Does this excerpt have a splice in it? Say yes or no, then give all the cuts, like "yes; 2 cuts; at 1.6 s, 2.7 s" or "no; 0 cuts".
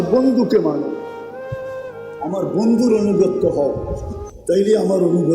yes; 2 cuts; at 1.0 s, 2.2 s